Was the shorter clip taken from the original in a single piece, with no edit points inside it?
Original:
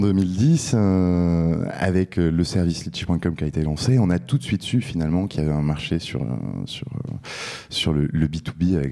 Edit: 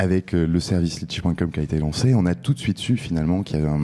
yes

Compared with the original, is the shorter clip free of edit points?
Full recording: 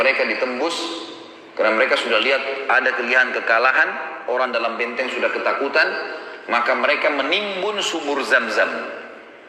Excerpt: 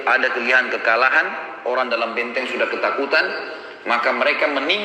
yes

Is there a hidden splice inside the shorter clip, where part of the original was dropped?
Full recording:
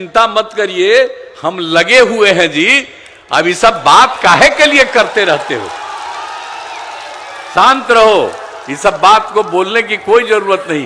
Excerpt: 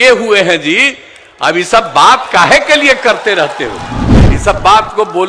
yes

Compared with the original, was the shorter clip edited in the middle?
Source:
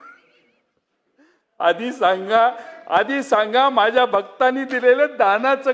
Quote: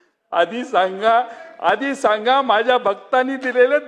no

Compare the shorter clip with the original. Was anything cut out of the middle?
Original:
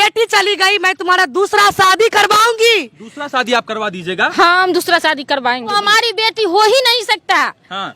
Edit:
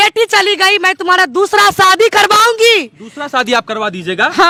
no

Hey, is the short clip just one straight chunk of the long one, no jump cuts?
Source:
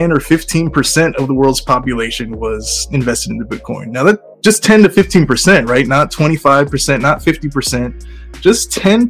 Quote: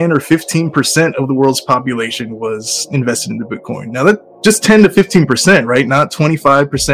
yes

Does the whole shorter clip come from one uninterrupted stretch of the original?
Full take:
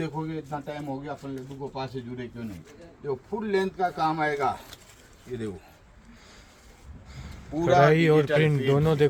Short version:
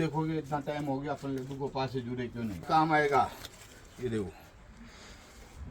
no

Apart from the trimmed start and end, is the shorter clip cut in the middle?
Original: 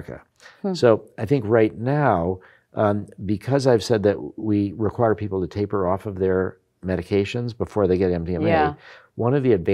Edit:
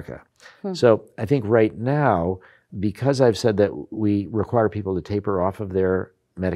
yes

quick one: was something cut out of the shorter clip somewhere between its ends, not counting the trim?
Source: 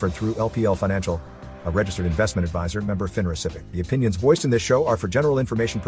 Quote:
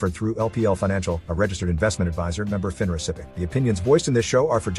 yes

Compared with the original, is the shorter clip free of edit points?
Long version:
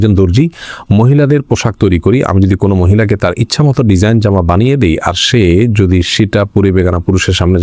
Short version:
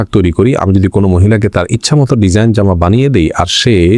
yes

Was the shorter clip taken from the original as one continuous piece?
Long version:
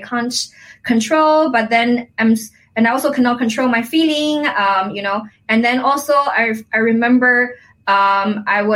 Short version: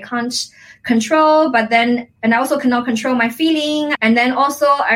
no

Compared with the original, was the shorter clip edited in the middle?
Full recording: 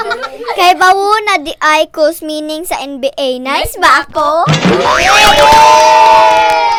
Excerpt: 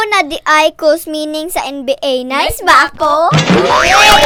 no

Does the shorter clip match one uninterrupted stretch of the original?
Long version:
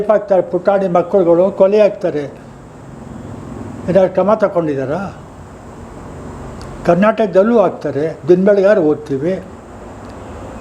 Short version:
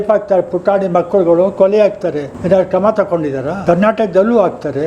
no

